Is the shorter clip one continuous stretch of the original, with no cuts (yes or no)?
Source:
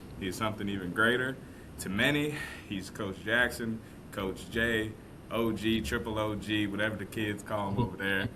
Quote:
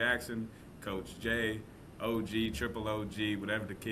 yes